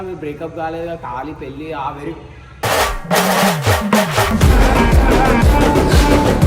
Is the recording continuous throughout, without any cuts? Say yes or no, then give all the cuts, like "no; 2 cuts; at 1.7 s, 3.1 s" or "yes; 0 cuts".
yes; 0 cuts